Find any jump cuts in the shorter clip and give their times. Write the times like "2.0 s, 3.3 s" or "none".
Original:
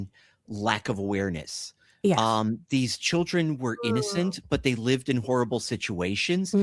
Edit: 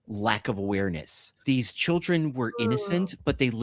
1.4 s